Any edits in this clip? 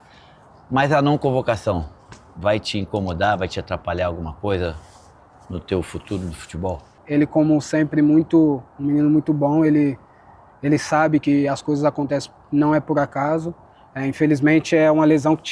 yes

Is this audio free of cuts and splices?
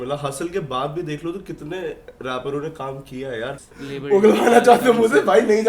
no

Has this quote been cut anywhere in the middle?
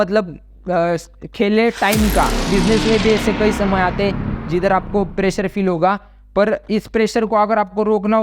yes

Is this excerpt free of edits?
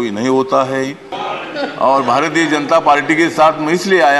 no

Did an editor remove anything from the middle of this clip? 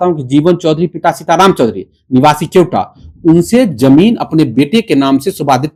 no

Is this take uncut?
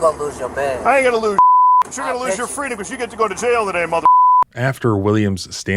yes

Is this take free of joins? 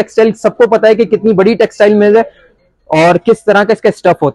yes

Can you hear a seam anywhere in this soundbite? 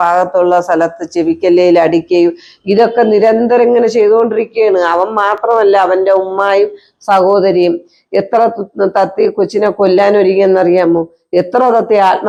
no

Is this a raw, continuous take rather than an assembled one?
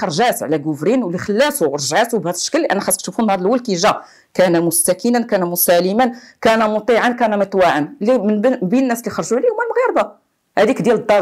yes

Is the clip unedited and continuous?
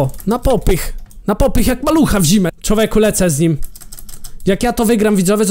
no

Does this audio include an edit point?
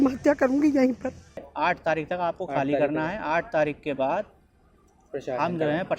yes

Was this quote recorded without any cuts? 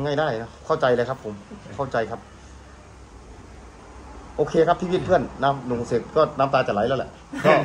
yes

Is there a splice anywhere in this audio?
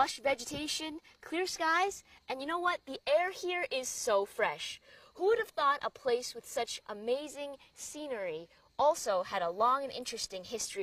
no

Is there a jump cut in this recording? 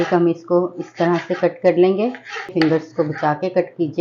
yes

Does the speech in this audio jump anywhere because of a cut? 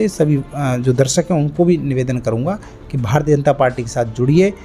no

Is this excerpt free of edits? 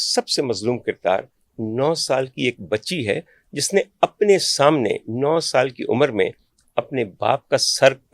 yes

